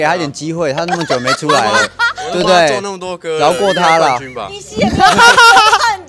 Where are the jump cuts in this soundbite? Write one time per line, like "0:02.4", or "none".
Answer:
none